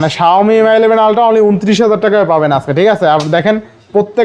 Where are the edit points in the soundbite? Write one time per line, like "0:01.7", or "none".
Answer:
none